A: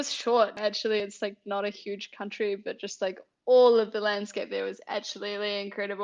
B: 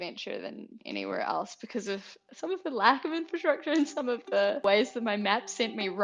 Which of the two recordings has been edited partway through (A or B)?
B